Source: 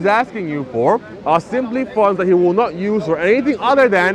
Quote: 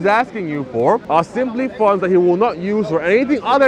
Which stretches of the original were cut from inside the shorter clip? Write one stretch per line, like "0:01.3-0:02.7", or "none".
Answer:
0:01.0-0:01.2